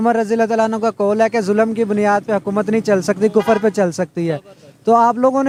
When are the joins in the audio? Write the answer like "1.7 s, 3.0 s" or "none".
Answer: none